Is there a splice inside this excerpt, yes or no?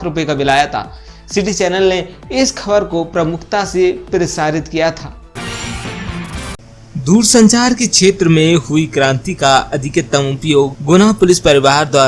yes